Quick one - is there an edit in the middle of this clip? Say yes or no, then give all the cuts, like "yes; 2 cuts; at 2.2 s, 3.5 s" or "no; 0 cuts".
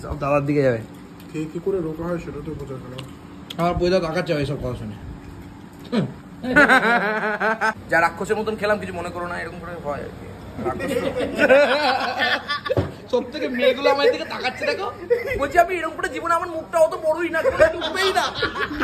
yes; 1 cut; at 7.8 s